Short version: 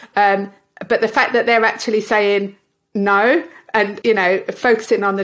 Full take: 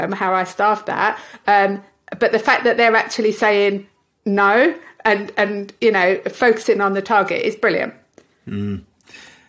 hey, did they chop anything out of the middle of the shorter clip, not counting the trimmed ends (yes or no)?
yes